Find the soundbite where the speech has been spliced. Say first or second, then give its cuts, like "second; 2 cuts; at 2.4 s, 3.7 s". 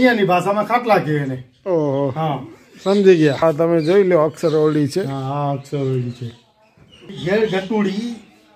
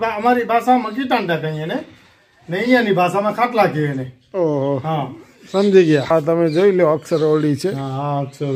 first; 1 cut; at 7.2 s